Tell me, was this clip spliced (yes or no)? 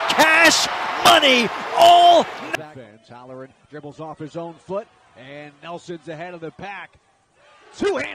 no